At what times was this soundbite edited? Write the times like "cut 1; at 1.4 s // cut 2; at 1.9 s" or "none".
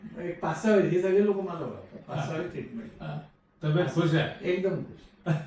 none